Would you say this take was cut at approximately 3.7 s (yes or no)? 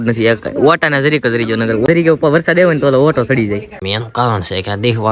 yes